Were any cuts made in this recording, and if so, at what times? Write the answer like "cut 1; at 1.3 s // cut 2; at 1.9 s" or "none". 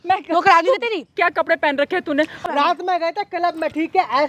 cut 1; at 1.1 s // cut 2; at 2.3 s